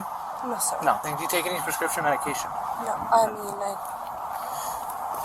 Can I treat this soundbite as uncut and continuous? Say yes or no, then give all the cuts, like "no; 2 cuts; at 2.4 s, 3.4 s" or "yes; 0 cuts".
no; 1 cut; at 1.1 s